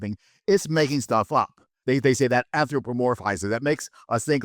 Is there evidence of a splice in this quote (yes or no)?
yes